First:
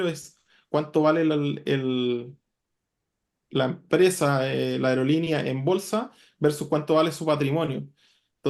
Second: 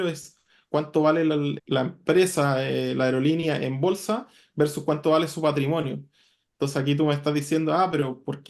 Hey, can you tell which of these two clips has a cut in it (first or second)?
second